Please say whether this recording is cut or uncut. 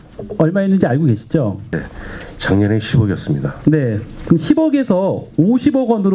uncut